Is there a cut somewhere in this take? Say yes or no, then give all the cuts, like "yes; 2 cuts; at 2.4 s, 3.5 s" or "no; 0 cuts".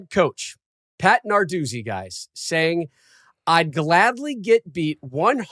no; 0 cuts